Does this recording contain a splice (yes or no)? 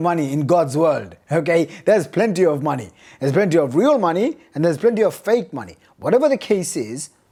no